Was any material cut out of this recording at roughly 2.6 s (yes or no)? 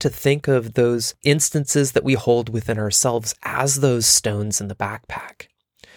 no